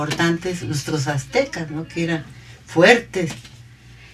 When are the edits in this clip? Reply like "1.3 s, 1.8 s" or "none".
1.3 s